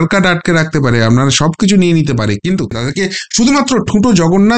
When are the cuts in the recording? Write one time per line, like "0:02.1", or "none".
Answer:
0:02.8